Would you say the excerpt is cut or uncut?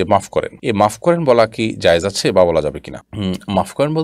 uncut